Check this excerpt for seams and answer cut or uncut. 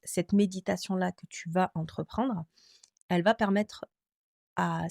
uncut